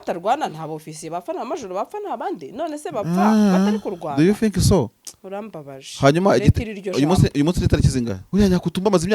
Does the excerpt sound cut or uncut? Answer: cut